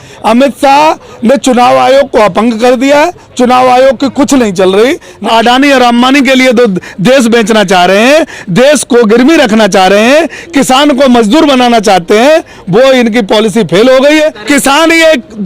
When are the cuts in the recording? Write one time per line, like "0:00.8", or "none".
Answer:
0:05.2
0:14.4